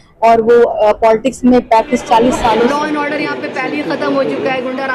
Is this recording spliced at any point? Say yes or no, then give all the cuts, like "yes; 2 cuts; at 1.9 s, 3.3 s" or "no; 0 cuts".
yes; 1 cut; at 2.7 s